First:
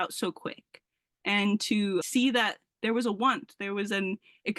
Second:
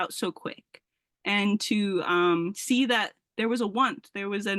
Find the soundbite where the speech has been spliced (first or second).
first